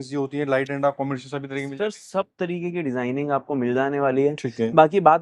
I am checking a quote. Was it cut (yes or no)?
no